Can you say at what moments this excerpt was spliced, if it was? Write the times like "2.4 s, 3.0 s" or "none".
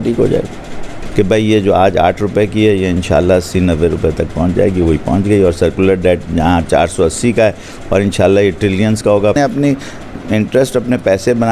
1.0 s, 9.3 s